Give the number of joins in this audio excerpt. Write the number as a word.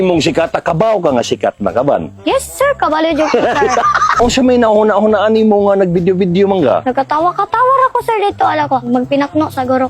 three